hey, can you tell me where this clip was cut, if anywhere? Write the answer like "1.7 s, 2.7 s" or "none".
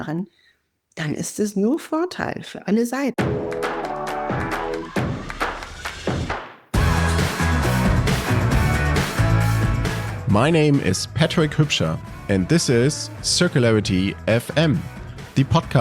3.1 s